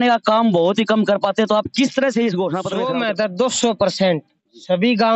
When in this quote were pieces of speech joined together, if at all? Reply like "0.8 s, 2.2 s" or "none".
2.7 s